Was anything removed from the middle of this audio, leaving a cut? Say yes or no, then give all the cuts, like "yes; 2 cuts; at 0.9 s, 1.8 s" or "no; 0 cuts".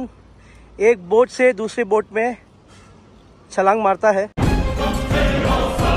yes; 1 cut; at 4.4 s